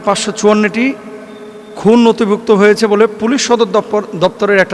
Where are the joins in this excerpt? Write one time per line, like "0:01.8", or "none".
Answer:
none